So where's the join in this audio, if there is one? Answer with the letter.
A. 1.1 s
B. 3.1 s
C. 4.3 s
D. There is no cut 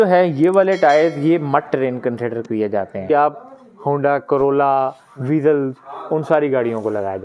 B